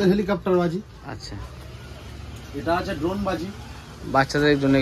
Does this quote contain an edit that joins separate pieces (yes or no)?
no